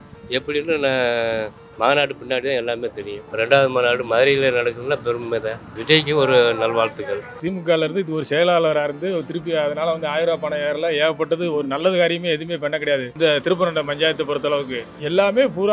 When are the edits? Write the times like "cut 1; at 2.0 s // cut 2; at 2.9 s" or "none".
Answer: cut 1; at 3.2 s // cut 2; at 7.3 s